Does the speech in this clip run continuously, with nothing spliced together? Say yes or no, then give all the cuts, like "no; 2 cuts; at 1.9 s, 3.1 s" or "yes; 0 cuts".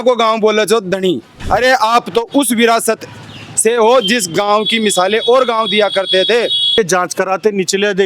no; 2 cuts; at 1.3 s, 6.8 s